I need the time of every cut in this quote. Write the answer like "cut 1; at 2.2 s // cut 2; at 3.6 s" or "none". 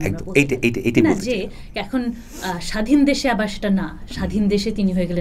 none